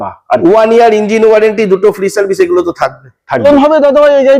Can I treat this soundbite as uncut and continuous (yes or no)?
no